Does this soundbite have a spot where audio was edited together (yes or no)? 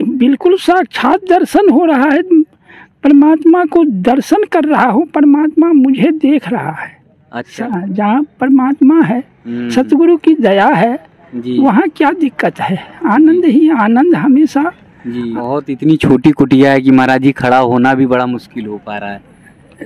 yes